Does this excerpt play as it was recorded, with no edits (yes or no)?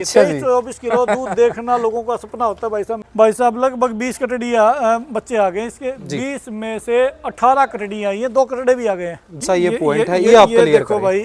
no